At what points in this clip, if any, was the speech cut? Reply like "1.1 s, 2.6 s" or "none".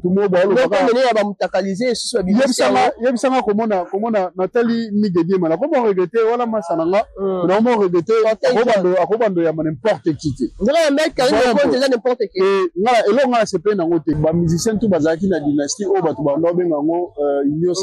14.2 s